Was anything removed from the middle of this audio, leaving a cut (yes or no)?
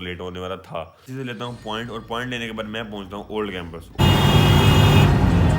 yes